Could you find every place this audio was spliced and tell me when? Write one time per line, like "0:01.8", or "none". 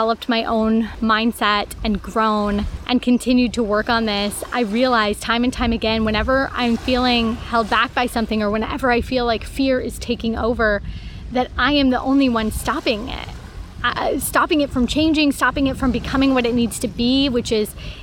none